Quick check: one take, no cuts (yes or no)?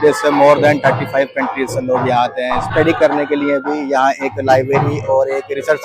no